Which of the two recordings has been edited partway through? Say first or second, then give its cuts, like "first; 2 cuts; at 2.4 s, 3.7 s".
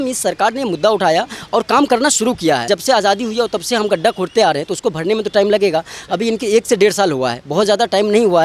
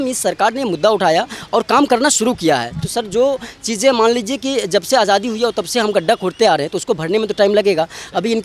first; 1 cut; at 2.6 s